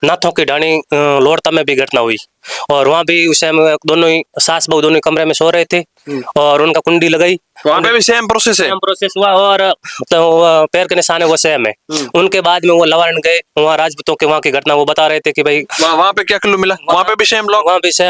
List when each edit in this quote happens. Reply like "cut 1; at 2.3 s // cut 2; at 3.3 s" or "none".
none